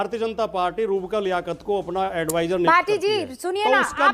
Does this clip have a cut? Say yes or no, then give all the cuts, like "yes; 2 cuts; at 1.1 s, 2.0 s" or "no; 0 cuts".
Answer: no; 0 cuts